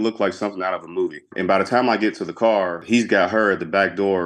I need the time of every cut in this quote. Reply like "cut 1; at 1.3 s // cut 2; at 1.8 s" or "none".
cut 1; at 1.3 s // cut 2; at 2.8 s